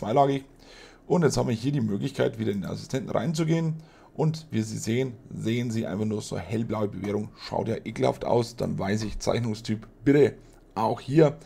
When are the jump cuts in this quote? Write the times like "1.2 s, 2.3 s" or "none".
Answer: none